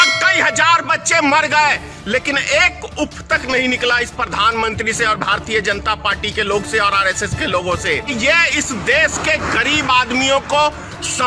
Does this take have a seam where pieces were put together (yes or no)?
yes